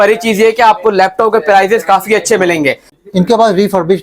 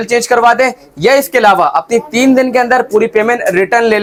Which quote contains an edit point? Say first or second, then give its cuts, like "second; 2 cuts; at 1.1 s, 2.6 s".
first; 1 cut; at 3.0 s